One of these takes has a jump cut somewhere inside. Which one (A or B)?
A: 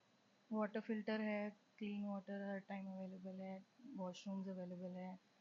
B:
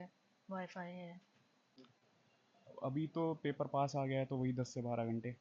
B